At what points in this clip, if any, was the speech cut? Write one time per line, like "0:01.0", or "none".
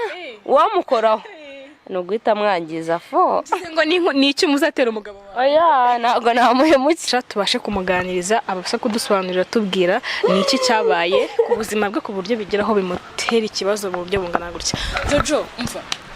0:07.1